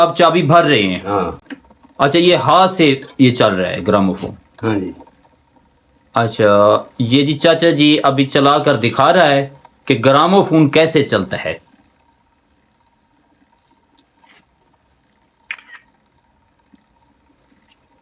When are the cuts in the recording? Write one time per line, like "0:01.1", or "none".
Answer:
none

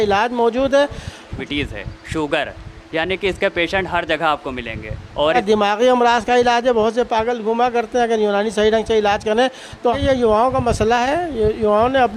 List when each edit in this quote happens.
0:01.4
0:05.4
0:10.0

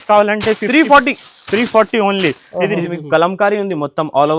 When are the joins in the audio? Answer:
0:02.8

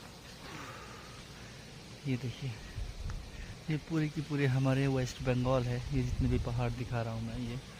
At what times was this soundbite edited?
none

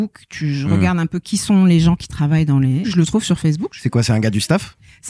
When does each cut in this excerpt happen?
0:02.9

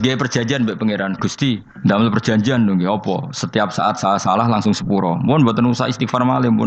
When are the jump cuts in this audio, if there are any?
0:01.7

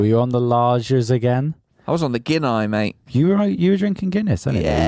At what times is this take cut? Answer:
0:03.0

